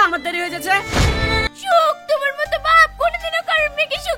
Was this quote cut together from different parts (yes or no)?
yes